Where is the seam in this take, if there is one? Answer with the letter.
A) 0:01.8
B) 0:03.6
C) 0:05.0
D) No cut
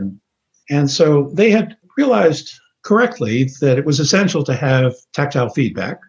A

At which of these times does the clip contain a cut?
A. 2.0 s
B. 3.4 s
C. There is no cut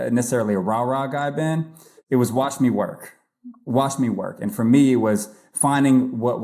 A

